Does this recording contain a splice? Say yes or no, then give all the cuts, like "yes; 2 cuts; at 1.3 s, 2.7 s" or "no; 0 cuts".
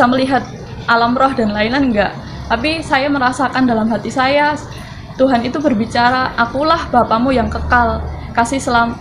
no; 0 cuts